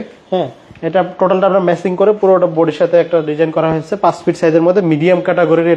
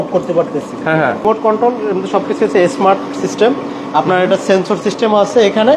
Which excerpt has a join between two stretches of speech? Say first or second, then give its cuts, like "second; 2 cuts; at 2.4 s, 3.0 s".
second; 1 cut; at 1.2 s